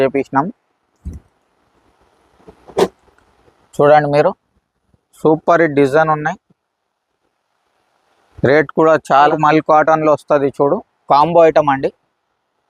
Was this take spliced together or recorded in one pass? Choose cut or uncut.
cut